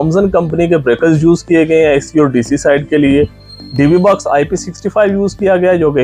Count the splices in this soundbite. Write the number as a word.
zero